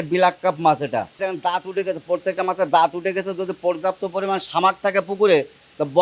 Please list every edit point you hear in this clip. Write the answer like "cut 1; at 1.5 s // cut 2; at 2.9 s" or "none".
cut 1; at 1.3 s